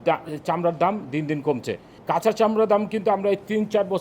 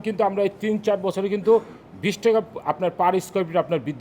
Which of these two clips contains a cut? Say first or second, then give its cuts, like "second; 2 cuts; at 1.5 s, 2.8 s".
first; 1 cut; at 2.0 s